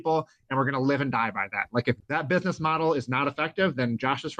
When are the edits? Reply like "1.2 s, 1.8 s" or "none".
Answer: 2.0 s